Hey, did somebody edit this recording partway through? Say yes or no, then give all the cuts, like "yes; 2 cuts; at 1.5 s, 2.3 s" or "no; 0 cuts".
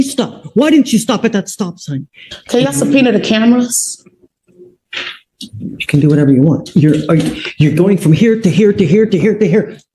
yes; 1 cut; at 2.0 s